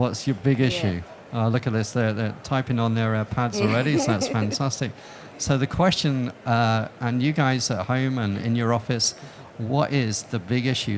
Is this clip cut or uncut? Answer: uncut